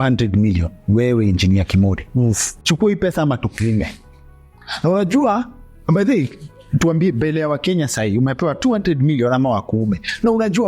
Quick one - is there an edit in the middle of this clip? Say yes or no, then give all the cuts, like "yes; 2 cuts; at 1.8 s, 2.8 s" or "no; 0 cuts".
yes; 1 cut; at 2.5 s